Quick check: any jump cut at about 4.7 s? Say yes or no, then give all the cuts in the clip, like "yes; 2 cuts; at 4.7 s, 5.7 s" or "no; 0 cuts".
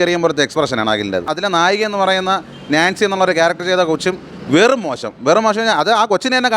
no; 1 cut; at 1.3 s